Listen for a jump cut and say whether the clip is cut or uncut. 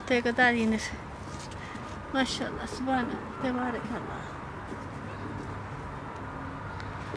uncut